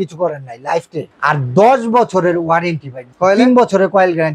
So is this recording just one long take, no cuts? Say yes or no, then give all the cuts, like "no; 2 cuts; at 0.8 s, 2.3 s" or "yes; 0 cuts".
no; 2 cuts; at 1.0 s, 3.1 s